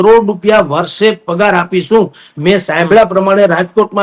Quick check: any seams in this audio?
no; 0 cuts

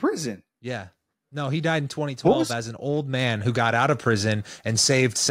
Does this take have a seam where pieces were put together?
no; 0 cuts

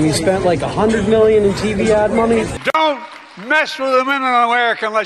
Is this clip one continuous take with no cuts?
no; 1 cut; at 2.5 s

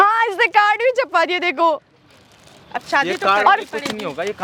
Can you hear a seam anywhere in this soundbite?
no; 0 cuts

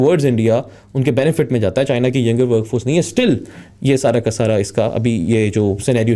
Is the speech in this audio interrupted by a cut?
no; 0 cuts

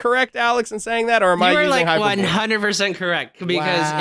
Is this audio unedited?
yes; 0 cuts

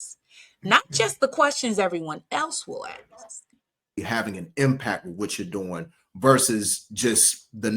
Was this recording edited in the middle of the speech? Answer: yes; 1 cut; at 4.0 s

